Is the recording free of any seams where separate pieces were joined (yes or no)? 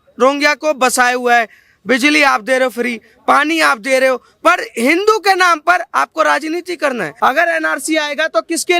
no